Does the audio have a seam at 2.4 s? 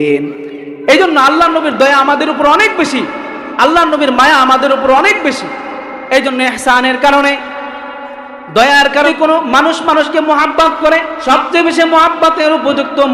no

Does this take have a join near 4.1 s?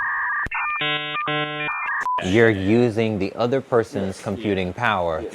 no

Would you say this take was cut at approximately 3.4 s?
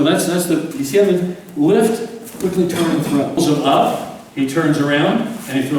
yes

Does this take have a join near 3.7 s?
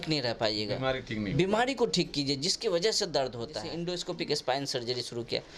yes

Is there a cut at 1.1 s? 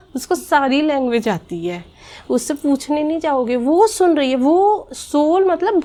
no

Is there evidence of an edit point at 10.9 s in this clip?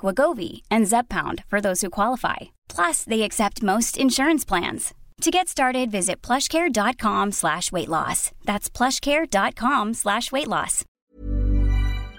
yes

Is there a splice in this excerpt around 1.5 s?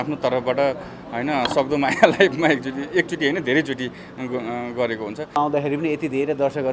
no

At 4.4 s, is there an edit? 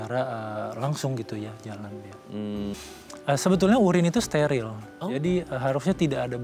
no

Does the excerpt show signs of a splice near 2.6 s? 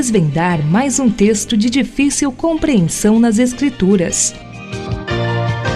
no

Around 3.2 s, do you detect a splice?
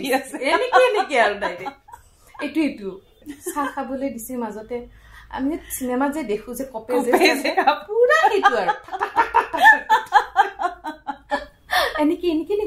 yes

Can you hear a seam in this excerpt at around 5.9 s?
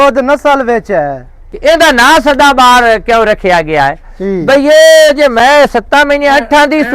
no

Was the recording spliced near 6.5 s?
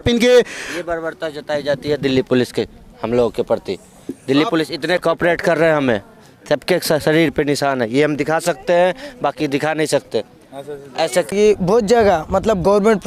no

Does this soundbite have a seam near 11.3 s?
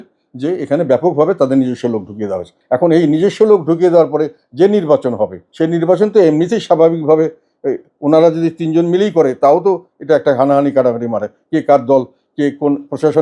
no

